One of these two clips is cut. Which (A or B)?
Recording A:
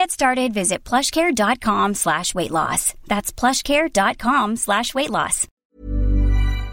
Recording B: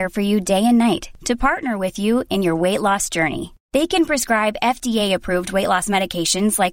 A